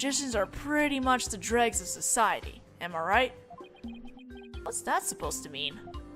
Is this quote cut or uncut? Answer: uncut